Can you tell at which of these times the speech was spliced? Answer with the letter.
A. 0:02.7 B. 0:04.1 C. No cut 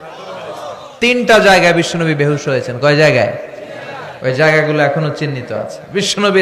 C